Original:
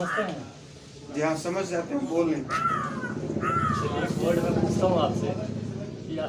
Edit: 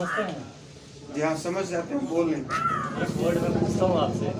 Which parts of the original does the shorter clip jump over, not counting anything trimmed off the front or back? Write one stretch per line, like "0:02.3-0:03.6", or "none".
0:03.0-0:04.0